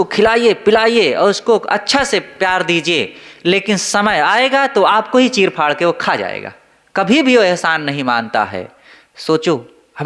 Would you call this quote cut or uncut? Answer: uncut